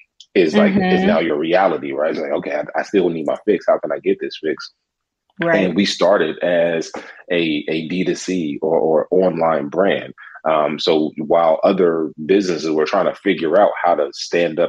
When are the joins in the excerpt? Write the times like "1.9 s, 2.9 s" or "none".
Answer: none